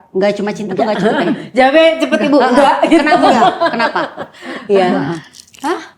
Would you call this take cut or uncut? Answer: uncut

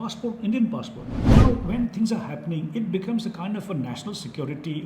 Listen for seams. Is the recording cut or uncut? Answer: cut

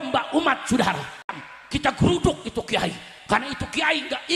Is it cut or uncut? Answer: cut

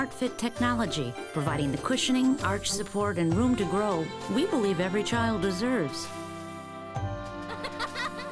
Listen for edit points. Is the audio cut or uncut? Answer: uncut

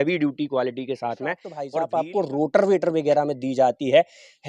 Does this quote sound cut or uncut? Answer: cut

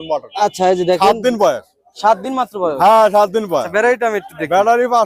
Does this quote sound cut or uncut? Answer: uncut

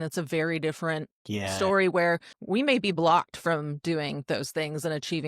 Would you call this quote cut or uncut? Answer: cut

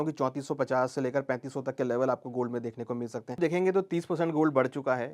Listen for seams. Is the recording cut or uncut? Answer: cut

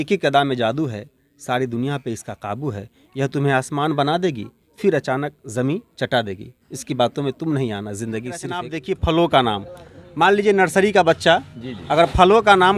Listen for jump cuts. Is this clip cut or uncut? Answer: cut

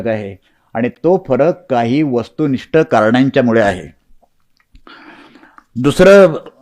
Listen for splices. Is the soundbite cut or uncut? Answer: uncut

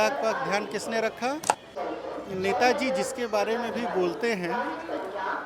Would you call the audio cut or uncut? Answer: cut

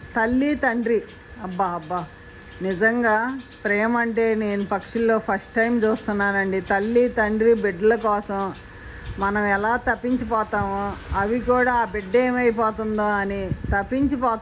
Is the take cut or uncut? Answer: uncut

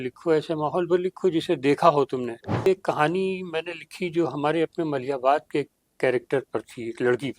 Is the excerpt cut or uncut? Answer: cut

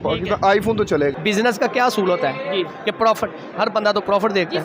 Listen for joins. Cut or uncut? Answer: cut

